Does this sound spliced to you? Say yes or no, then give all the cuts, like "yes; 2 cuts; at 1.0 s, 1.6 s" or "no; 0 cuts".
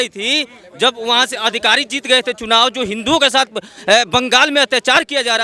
no; 0 cuts